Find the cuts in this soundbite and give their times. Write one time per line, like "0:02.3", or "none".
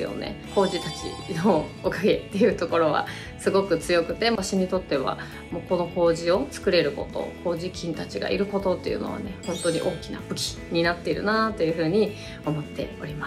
0:04.4